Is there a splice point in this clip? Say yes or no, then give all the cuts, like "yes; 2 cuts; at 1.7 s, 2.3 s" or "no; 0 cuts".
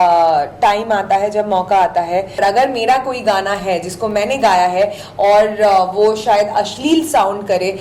yes; 1 cut; at 2.4 s